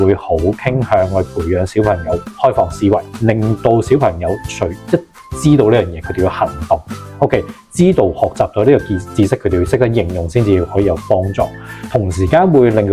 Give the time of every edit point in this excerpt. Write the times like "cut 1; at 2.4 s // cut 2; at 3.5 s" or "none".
none